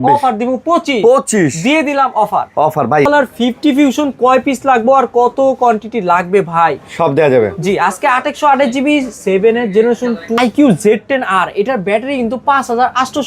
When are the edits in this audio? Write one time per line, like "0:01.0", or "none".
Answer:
0:03.0
0:10.3